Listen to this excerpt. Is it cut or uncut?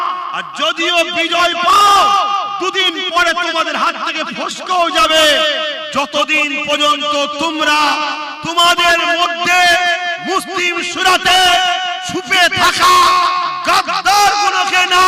uncut